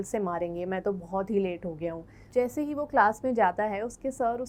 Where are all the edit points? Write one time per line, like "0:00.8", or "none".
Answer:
none